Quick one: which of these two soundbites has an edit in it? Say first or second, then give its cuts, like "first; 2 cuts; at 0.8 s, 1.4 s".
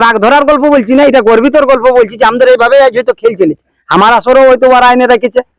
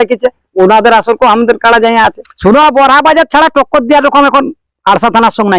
second; 1 cut; at 2.3 s